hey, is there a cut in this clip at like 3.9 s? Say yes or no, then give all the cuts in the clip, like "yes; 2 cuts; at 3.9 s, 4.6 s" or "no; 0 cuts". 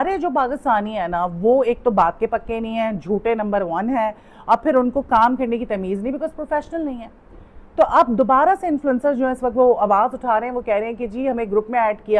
no; 0 cuts